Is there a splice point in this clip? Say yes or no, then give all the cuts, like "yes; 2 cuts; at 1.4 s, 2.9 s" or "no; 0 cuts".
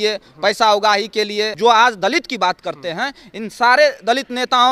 yes; 1 cut; at 1.5 s